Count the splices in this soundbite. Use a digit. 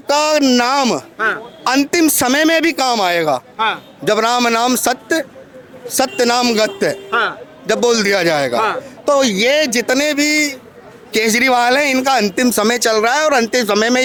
0